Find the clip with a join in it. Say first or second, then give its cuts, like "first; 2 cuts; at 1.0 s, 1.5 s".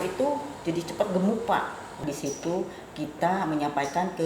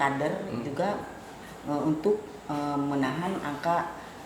first; 1 cut; at 2.0 s